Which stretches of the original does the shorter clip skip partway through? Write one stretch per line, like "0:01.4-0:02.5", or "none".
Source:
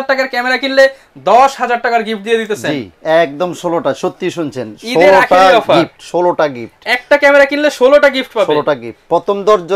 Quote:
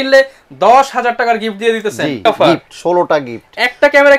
0:02.9-0:05.5